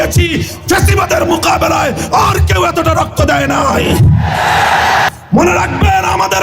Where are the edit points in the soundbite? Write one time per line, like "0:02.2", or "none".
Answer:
0:05.1